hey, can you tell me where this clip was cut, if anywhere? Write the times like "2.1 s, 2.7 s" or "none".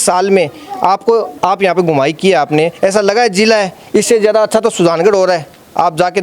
none